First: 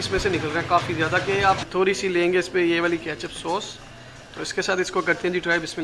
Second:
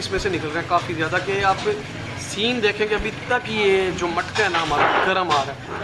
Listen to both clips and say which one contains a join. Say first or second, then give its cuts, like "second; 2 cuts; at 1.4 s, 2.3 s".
first; 1 cut; at 1.6 s